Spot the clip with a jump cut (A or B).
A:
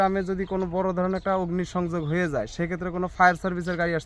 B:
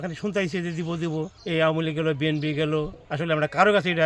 B